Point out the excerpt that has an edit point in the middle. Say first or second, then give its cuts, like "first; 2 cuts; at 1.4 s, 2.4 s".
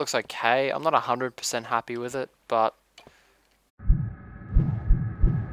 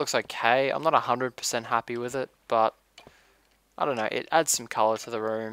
second; 1 cut; at 3.6 s